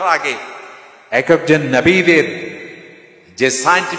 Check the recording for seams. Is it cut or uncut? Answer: uncut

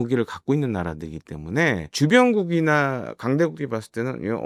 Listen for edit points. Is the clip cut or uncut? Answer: uncut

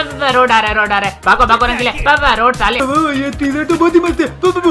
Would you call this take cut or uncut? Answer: cut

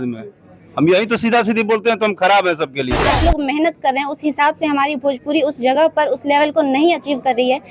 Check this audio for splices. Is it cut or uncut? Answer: cut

